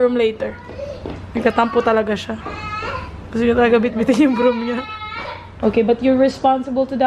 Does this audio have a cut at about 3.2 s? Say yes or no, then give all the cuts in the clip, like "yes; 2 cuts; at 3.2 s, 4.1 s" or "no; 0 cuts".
no; 1 cut; at 5.4 s